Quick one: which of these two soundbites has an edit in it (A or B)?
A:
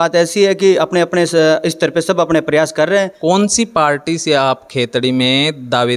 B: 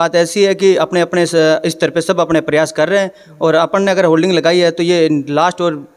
A